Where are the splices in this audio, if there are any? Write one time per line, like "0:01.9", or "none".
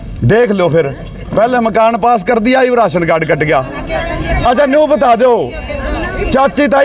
none